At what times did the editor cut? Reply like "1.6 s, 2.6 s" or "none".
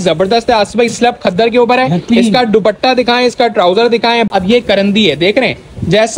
4.3 s